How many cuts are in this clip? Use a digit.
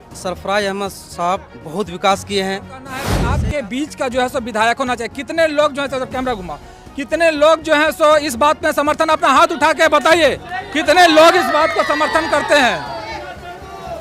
1